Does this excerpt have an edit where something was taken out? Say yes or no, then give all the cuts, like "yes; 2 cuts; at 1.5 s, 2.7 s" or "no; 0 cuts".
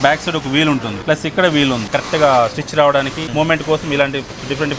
yes; 3 cuts; at 0.9 s, 1.9 s, 3.3 s